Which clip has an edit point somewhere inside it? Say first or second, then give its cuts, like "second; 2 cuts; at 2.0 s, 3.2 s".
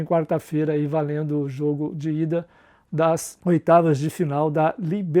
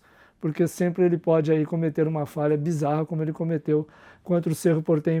first; 1 cut; at 3.3 s